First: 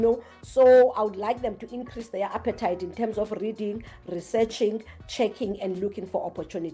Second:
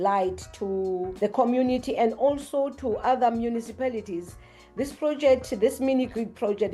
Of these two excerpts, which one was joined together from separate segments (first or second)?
second